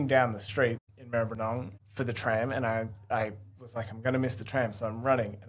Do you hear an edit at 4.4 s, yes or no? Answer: no